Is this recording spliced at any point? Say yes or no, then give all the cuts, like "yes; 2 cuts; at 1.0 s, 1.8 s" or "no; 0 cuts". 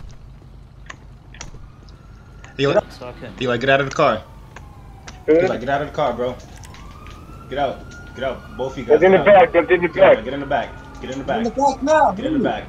yes; 1 cut; at 2.6 s